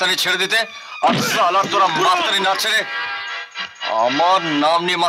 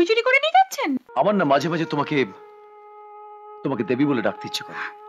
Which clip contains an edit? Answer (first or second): second